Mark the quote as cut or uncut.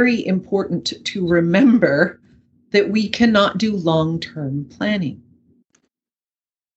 uncut